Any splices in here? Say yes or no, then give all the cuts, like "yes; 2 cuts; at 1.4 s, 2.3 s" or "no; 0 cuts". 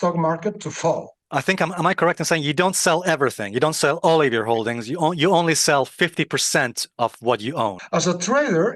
yes; 2 cuts; at 1.2 s, 7.8 s